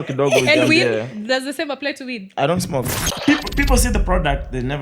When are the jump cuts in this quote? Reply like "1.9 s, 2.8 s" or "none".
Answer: 3.1 s